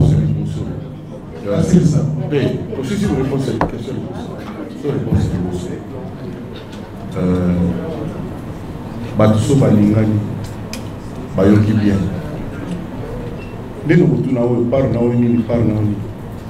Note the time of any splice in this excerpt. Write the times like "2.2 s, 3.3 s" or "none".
none

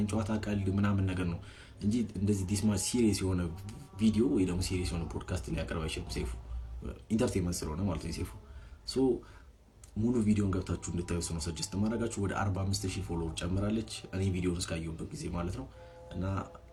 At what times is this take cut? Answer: none

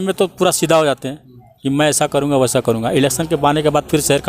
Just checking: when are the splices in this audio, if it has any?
none

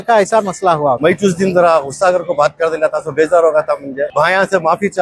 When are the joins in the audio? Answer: 1.0 s, 4.1 s

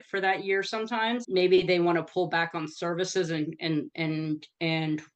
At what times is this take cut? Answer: 1.2 s

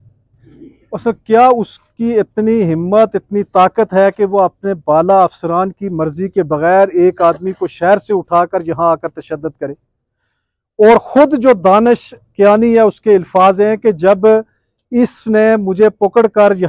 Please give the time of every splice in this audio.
none

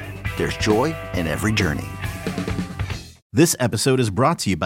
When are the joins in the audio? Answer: 3.2 s

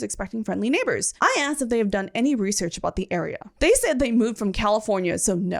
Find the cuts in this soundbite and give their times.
1.1 s, 3.5 s

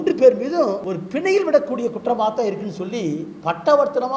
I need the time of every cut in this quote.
0.9 s

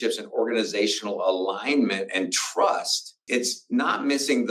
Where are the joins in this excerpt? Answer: 3.2 s

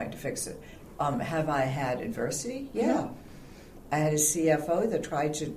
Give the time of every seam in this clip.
none

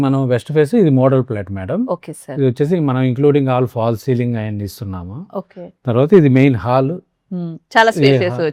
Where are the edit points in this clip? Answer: none

